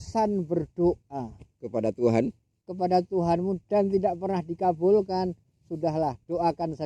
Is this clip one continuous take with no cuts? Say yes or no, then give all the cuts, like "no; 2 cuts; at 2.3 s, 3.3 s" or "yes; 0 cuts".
yes; 0 cuts